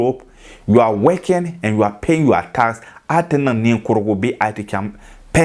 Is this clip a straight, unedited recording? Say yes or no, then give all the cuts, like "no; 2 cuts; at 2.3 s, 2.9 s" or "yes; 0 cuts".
yes; 0 cuts